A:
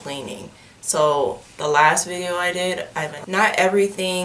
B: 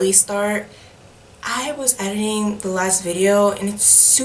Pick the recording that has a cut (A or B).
A